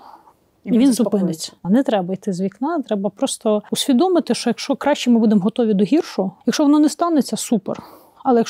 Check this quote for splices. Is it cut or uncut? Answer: cut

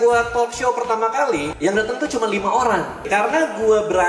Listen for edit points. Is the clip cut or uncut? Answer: cut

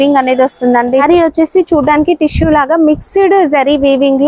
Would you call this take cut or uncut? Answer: cut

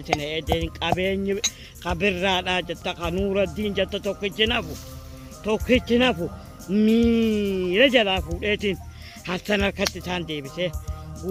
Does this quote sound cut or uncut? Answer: uncut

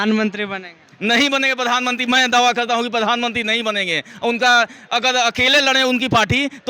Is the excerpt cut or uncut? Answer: uncut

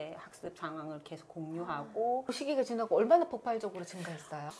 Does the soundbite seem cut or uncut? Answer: cut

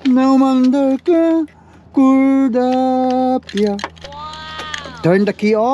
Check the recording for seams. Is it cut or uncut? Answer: uncut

